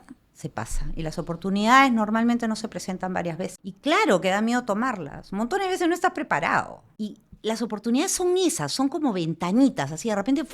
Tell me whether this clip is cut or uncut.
cut